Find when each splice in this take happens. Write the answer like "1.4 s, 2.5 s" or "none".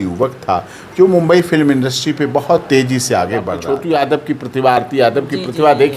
3.5 s